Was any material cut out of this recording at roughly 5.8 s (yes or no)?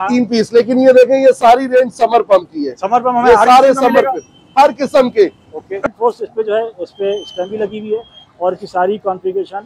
yes